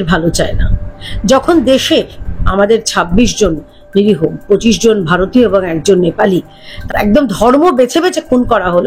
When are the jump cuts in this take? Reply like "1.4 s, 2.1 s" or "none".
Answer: 6.7 s